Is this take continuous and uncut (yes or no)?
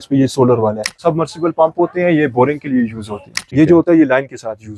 no